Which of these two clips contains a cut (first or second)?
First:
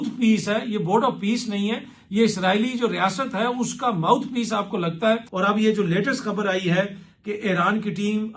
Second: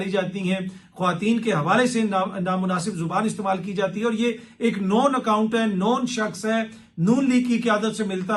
first